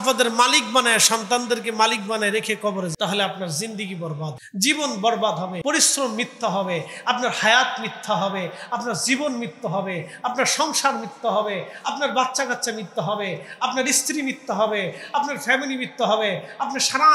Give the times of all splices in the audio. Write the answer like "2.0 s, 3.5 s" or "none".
2.9 s, 4.4 s, 5.6 s